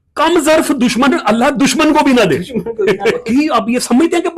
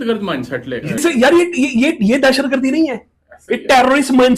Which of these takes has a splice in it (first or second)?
first